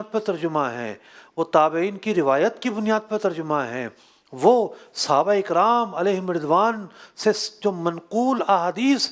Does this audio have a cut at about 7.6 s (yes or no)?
no